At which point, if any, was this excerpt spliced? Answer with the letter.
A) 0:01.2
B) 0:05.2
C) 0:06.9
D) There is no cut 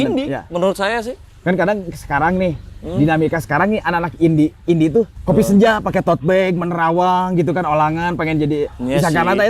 B